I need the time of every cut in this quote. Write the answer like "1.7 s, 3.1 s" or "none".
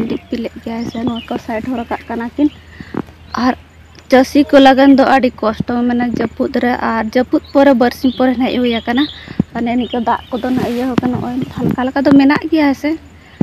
none

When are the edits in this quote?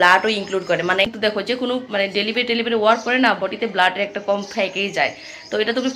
1.1 s

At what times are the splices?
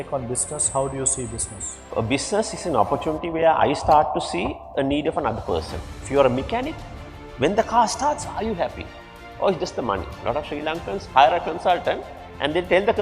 1.9 s, 6.0 s, 10.2 s

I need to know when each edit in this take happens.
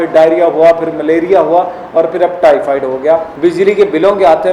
3.3 s

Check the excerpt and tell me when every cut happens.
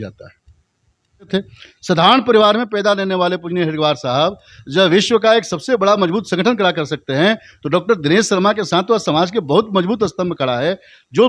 1.3 s

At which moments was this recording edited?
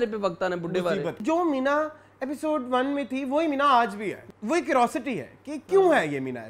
1.2 s, 4.3 s

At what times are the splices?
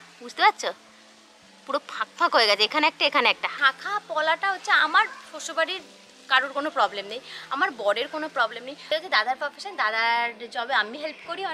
3.5 s, 8.8 s

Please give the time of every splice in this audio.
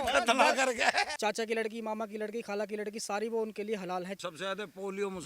1.1 s, 4.2 s

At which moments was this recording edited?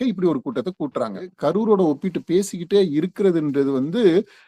1.3 s

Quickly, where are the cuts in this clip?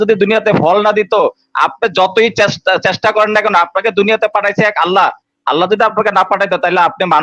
none

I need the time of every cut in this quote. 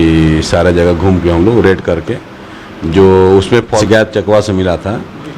3.8 s

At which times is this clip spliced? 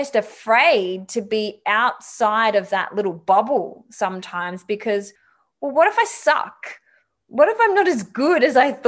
none

